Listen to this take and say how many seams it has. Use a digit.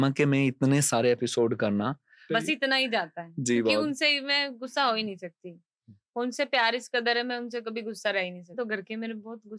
2